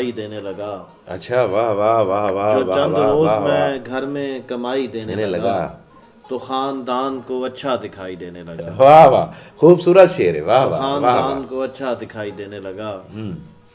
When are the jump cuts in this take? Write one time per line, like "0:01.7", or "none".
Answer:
none